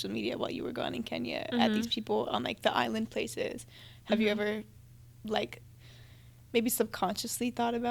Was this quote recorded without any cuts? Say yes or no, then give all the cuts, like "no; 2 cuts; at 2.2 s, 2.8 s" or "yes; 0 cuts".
yes; 0 cuts